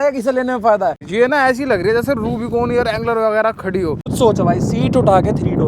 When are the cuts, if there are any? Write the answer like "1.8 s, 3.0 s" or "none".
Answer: 1.0 s, 4.1 s